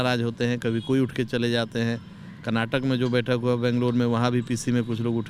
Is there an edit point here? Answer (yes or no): no